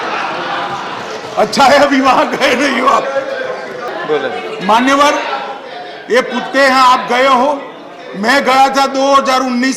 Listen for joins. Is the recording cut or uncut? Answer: cut